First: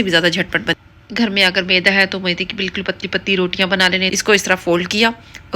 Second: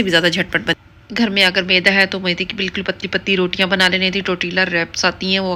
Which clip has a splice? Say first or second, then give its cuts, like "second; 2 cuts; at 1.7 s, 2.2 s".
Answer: first; 1 cut; at 4.1 s